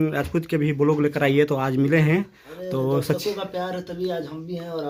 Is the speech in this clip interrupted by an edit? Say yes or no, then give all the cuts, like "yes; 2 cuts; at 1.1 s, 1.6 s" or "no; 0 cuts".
no; 0 cuts